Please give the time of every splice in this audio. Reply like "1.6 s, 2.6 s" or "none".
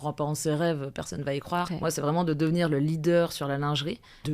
1.7 s